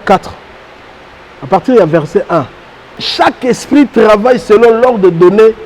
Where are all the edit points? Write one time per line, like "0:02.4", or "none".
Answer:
0:03.0